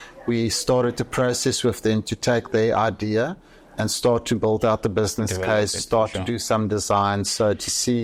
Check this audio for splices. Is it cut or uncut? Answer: uncut